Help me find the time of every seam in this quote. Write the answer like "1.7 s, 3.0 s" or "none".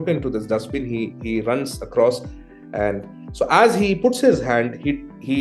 none